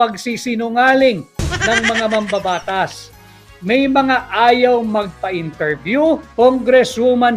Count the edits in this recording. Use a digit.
1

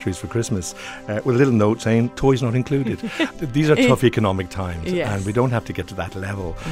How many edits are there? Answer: 1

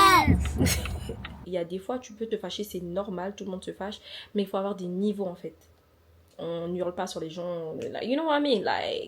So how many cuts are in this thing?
1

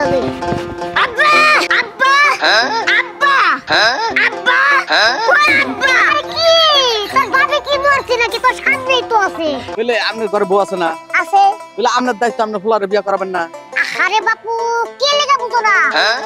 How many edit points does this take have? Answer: 2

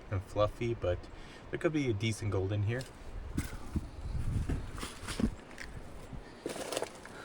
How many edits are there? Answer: 1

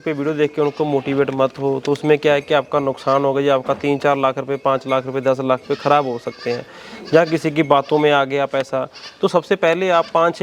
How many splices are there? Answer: 0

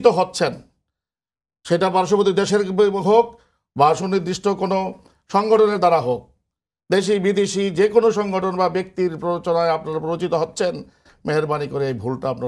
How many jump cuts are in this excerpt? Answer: 0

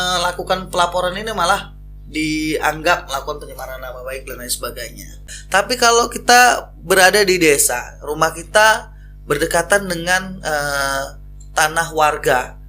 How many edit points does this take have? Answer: 1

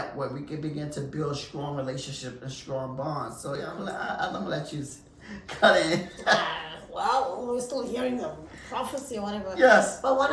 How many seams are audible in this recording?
0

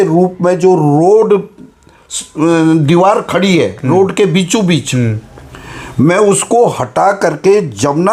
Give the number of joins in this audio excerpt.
0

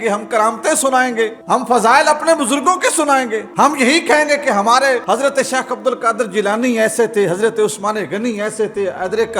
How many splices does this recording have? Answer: 3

